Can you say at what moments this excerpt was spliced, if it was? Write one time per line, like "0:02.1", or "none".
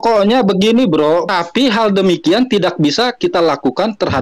0:01.3